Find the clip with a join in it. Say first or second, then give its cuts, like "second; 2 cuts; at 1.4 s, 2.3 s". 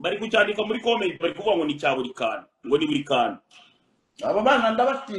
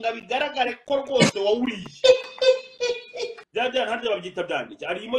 second; 1 cut; at 3.4 s